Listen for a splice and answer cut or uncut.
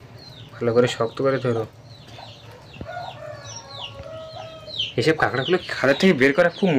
uncut